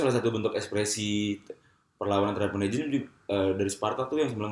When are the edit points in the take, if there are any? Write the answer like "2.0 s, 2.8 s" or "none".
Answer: none